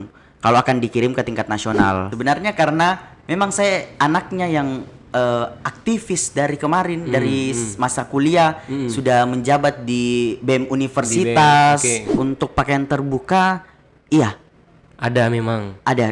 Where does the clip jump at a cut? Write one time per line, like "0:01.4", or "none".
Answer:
0:02.1
0:12.2